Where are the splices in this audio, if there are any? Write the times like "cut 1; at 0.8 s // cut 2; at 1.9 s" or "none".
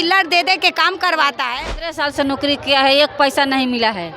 cut 1; at 2.0 s